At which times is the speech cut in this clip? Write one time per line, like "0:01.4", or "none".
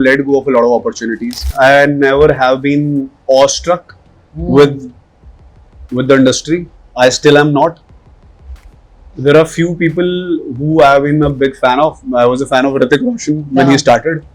0:01.5
0:06.8